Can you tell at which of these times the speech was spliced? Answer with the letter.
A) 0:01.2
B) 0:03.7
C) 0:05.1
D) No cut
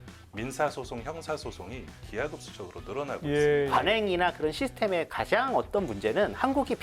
B